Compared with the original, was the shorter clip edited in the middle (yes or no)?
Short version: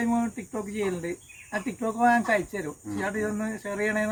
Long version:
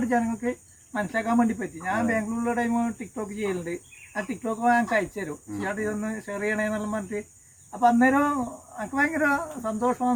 no